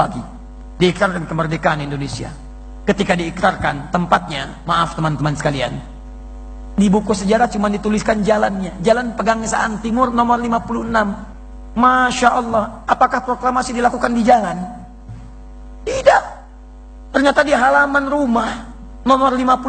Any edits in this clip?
no; 0 cuts

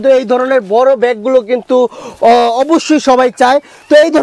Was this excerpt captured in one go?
yes; 0 cuts

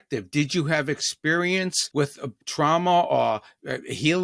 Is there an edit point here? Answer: yes; 1 cut; at 2.3 s

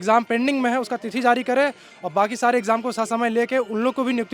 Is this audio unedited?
yes; 0 cuts

